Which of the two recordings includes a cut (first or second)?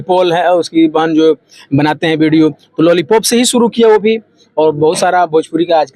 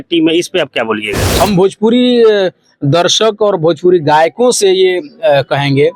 second